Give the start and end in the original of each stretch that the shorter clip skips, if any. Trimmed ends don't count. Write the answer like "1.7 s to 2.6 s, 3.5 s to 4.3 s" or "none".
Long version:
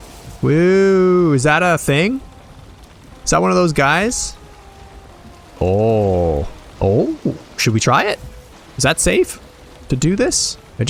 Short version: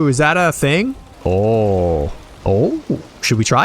2.3 s to 5.4 s